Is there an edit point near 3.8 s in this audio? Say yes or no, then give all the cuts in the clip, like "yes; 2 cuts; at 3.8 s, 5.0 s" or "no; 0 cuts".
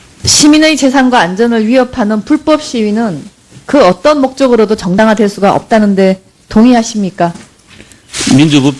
no; 1 cut; at 2.0 s